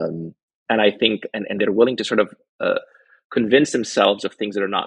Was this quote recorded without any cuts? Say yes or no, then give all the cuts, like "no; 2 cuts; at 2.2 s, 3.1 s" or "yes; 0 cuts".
yes; 0 cuts